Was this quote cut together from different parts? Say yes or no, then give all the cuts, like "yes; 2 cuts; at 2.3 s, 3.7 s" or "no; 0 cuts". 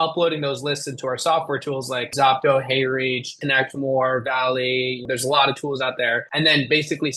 yes; 4 cuts; at 2.1 s, 3.3 s, 5.0 s, 6.2 s